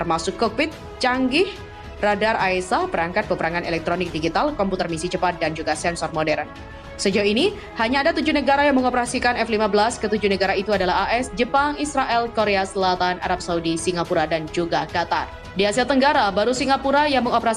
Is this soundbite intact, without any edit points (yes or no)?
no